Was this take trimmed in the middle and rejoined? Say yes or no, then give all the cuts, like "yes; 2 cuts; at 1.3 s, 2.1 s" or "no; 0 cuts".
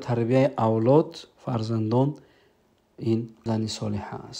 yes; 1 cut; at 3.3 s